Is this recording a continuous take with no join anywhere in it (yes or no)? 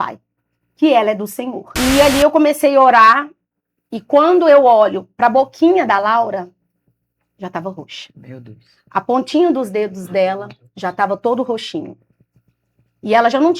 no